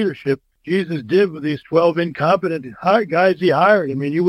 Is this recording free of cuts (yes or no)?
yes